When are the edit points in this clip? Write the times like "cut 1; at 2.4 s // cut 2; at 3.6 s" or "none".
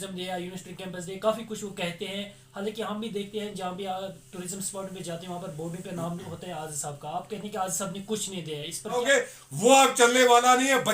cut 1; at 9.0 s